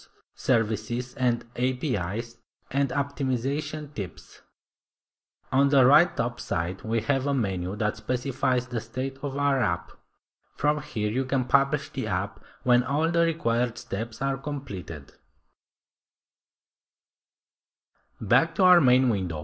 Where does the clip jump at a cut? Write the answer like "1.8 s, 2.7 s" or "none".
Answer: 6.8 s